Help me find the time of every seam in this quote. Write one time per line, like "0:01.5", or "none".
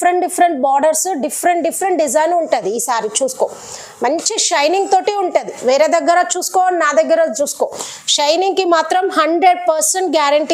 none